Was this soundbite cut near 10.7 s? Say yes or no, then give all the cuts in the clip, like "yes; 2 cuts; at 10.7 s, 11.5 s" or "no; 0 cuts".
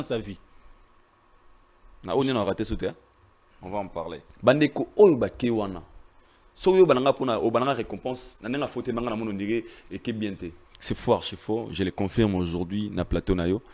yes; 2 cuts; at 4.2 s, 10.7 s